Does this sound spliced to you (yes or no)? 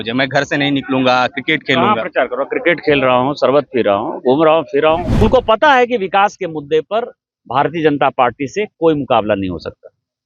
yes